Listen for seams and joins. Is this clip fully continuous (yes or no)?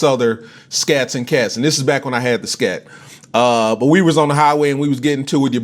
no